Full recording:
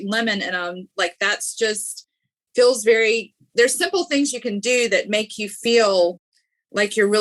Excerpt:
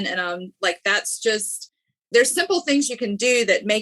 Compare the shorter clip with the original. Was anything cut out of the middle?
yes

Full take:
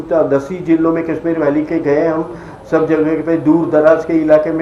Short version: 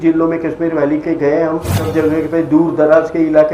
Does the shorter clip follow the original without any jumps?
no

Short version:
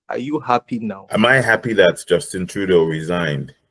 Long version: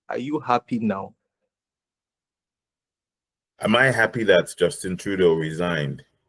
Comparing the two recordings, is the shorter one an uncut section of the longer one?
no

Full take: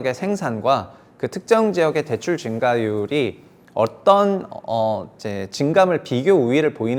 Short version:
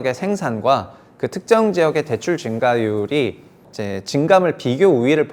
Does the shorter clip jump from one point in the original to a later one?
yes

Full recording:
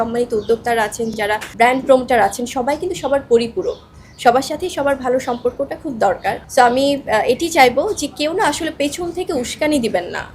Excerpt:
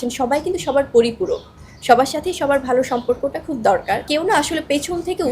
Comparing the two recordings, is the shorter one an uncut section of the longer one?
no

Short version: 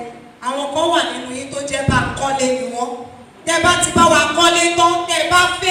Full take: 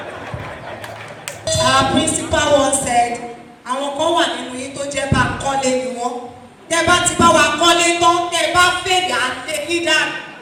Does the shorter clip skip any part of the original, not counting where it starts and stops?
no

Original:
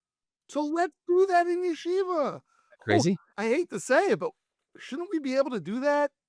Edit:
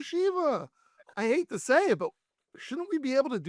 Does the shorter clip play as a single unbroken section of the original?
no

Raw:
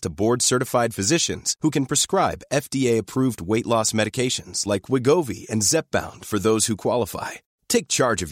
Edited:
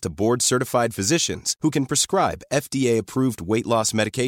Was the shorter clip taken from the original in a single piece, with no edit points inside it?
yes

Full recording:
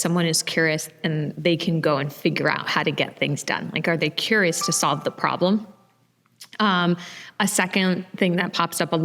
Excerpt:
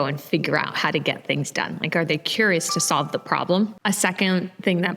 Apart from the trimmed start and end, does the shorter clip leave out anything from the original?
yes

